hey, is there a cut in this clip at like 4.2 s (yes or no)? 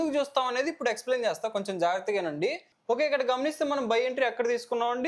no